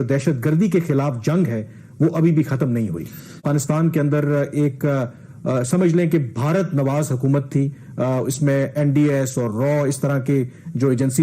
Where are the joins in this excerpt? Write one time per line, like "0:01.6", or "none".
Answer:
0:03.4